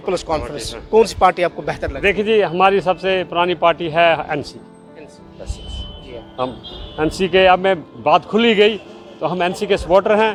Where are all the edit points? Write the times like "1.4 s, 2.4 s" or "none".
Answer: none